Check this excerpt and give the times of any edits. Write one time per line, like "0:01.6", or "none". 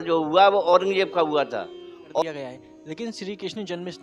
0:02.1